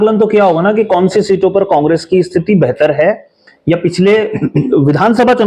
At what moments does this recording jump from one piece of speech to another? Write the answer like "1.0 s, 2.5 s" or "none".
none